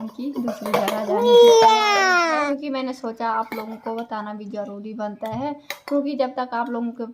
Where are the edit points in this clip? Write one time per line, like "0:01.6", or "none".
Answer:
0:02.5